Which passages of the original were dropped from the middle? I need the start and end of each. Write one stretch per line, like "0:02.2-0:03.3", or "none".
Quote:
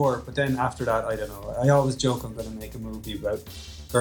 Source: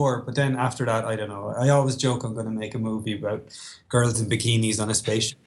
none